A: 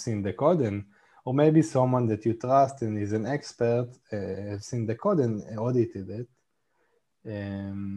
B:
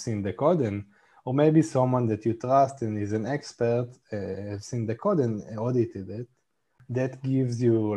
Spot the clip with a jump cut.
B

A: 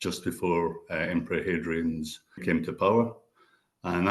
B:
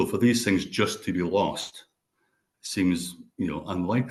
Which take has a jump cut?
A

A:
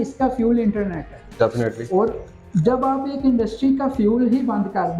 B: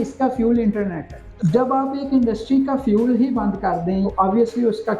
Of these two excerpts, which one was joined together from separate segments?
B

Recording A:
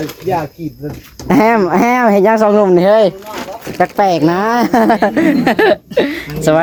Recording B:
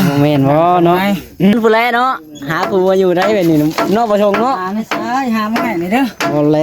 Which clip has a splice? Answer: B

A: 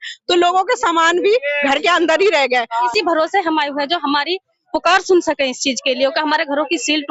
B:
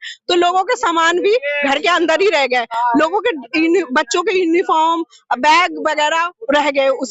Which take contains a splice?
A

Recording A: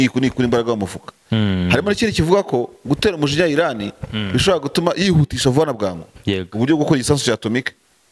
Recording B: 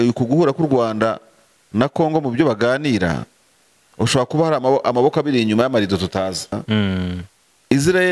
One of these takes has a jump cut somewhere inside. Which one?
B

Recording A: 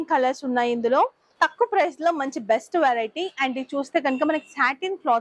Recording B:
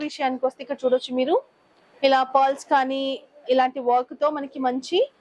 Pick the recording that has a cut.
A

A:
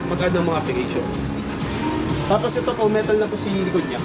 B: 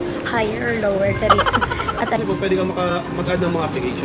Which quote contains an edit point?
B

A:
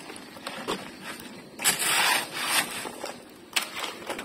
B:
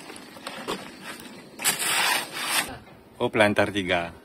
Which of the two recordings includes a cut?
B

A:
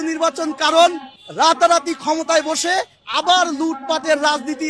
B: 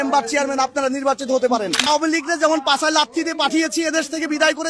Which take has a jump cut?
B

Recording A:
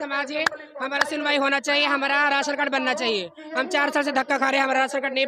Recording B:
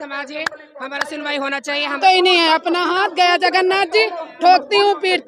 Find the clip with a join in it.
B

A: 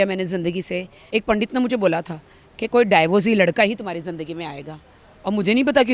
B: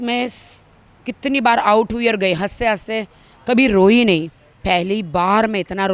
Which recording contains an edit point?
A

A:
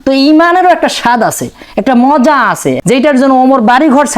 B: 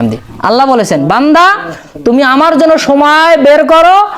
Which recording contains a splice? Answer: A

